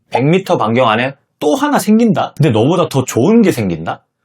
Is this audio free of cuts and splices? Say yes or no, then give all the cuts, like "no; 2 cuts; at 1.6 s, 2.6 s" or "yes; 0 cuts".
no; 1 cut; at 2.3 s